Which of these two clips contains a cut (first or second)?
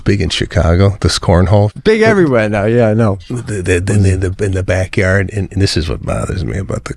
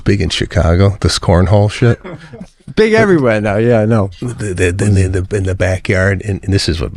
first